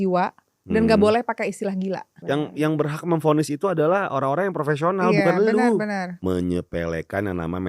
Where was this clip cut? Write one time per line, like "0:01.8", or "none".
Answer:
0:02.1
0:06.1